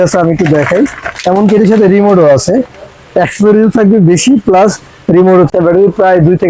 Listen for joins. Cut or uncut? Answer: cut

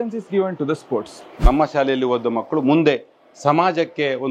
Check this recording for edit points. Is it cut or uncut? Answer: cut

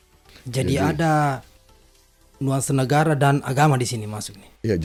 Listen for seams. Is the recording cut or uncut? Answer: uncut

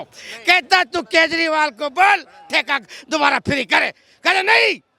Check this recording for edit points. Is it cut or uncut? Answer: uncut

